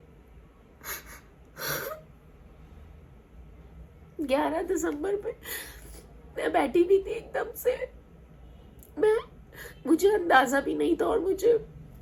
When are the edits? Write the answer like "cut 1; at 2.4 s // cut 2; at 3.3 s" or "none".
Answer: none